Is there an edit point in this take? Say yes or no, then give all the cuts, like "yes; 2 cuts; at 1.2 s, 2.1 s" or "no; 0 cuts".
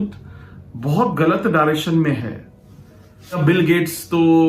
yes; 1 cut; at 3.4 s